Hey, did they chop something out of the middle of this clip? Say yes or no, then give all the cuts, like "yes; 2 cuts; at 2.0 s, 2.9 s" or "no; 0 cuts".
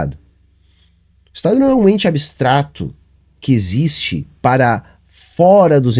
no; 0 cuts